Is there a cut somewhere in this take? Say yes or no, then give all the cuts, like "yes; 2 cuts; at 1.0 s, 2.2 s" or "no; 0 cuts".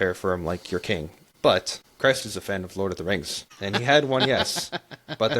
yes; 3 cuts; at 1.2 s, 1.8 s, 3.8 s